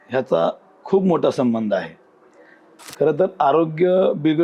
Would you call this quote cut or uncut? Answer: uncut